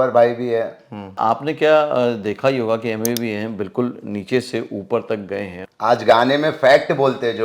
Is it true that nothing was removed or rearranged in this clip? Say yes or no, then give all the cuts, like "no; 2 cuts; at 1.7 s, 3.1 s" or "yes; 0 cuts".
no; 2 cuts; at 1.2 s, 5.6 s